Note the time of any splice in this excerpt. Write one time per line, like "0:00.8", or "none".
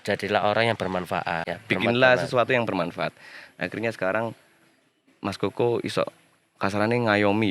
0:01.5

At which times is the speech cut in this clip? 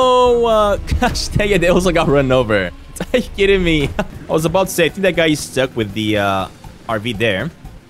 0:04.2
0:06.7

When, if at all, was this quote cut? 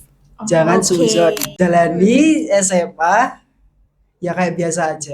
0:01.5

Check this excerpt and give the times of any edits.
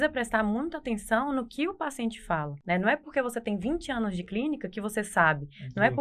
0:02.5

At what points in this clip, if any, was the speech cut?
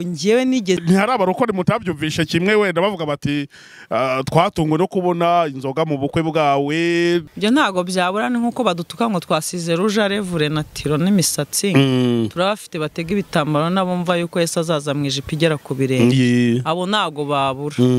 0:00.8
0:07.3

